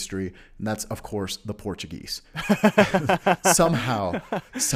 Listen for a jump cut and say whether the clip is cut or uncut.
uncut